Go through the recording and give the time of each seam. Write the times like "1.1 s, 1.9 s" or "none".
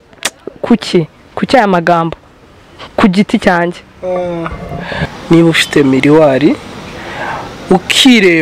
5.0 s